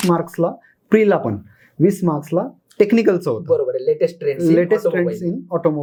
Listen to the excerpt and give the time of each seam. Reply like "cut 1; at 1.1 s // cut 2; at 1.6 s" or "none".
none